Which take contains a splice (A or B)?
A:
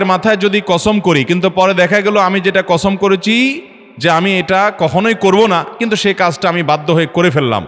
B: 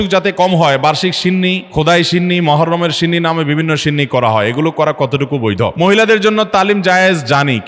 B